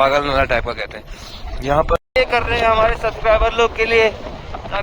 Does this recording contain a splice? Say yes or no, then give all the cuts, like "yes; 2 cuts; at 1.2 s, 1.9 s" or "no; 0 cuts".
yes; 1 cut; at 2.1 s